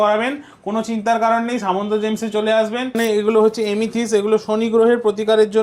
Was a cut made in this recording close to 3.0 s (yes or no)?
yes